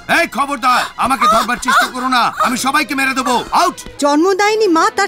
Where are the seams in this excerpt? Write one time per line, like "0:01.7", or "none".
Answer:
0:03.9